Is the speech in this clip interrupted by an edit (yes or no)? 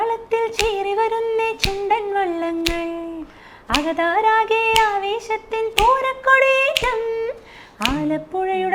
no